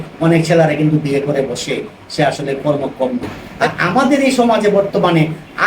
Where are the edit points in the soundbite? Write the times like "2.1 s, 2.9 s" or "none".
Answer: 3.5 s